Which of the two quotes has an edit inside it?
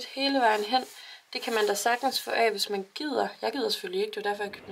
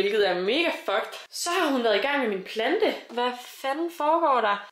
second; 1 cut; at 3.1 s

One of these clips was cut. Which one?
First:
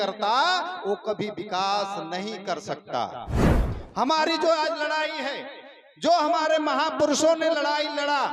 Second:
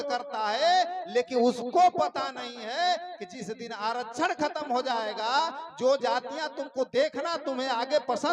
first; 1 cut; at 3.5 s

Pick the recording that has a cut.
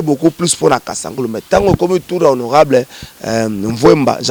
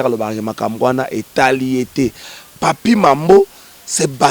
second; 1 cut; at 2.3 s

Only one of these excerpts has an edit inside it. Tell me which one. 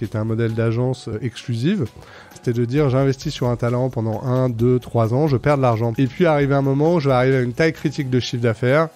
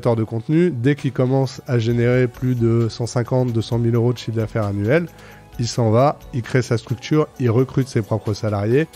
first; 3 cuts; at 1.1 s, 2.4 s, 5.9 s

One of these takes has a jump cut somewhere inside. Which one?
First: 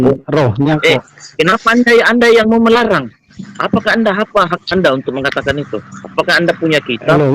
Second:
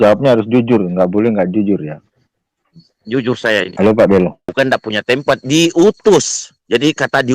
second; 1 cut; at 4.4 s

